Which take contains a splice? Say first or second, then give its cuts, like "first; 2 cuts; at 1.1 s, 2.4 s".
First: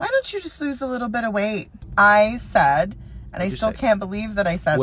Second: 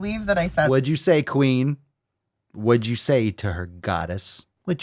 first; 1 cut; at 1.8 s